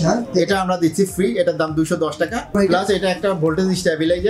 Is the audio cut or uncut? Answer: cut